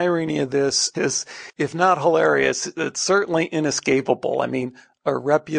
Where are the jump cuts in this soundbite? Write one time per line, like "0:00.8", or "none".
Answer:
0:00.9